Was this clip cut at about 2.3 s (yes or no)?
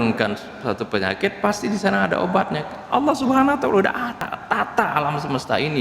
no